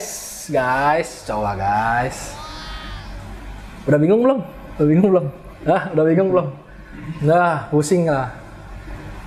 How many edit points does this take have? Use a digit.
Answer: 0